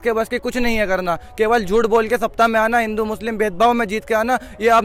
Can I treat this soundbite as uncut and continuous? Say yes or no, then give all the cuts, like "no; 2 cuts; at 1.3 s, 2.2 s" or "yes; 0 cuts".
yes; 0 cuts